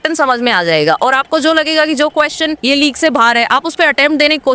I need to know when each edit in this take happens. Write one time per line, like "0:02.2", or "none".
0:02.6